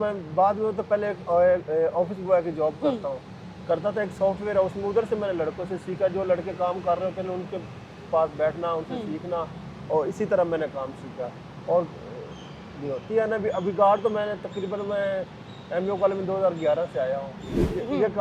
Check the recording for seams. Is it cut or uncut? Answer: uncut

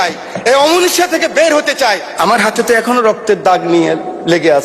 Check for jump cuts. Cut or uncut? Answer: cut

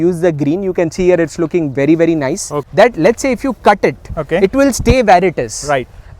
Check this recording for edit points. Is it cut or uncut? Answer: cut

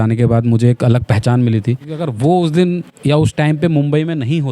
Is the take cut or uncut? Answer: cut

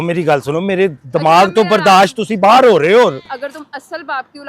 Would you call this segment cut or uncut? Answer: cut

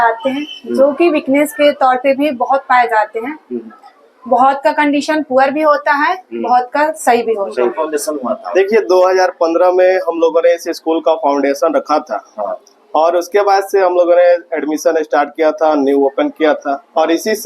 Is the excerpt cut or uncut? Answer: cut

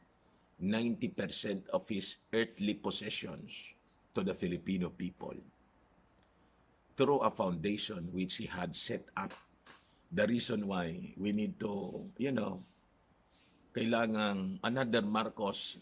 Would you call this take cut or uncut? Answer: cut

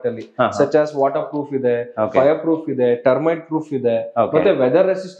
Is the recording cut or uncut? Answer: uncut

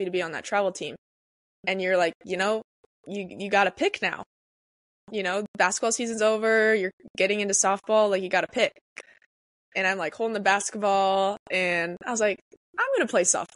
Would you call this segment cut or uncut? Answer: uncut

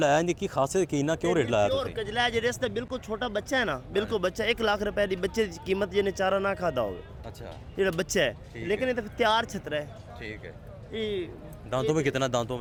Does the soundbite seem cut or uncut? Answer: uncut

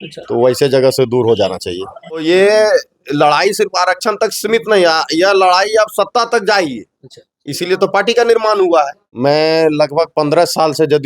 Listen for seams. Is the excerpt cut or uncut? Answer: cut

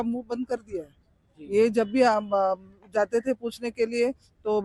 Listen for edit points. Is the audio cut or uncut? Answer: uncut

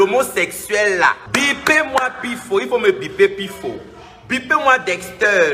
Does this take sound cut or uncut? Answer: cut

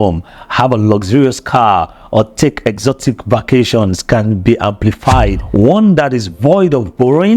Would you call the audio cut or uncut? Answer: cut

